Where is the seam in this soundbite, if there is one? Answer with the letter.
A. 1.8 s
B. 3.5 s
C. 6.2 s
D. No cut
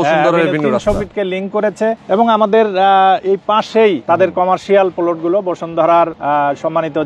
C